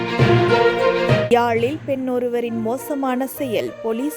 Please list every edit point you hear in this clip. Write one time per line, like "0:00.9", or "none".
0:01.3